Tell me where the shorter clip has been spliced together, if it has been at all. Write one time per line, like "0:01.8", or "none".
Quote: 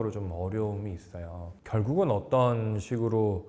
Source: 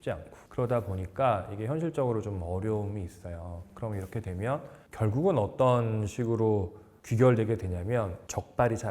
0:01.5